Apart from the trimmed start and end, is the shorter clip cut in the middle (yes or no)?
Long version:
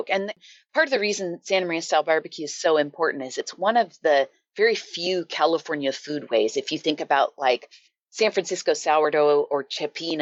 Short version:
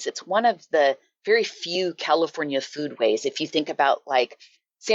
no